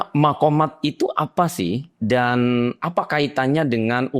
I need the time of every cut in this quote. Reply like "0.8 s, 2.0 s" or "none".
none